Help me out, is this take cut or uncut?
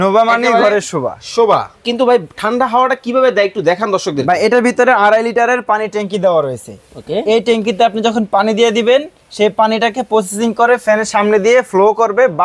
cut